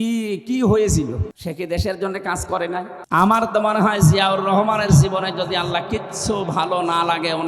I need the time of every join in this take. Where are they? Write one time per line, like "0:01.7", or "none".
0:01.3
0:03.0